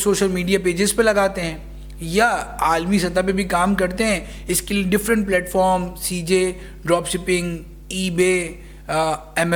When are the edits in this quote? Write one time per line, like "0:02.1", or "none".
none